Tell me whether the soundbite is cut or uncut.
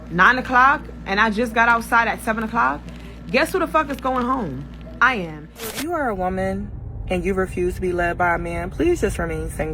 cut